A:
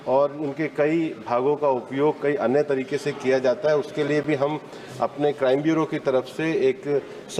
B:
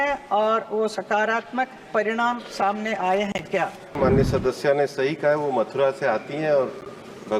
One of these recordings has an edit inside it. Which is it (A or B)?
B